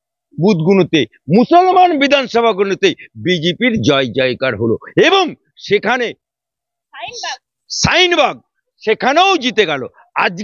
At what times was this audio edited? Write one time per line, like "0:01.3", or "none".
none